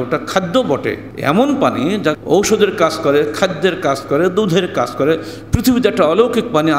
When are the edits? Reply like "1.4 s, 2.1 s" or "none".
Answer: 1.1 s, 2.2 s

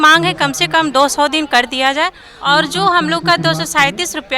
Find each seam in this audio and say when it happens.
2.3 s

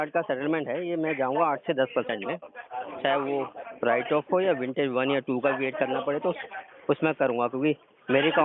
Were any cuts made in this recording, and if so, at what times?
none

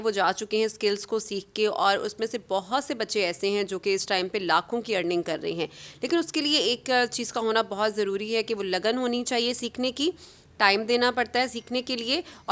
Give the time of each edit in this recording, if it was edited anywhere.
none

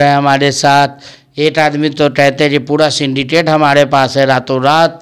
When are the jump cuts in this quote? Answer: none

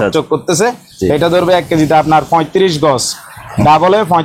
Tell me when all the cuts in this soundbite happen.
none

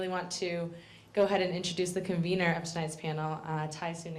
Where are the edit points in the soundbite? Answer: none

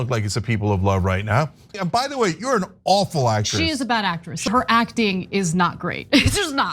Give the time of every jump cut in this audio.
1.7 s, 4.5 s

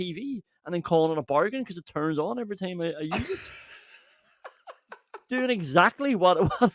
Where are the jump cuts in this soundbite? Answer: none

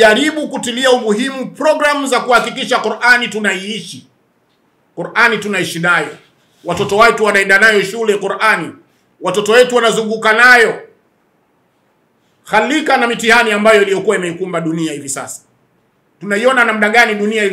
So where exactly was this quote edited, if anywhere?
none

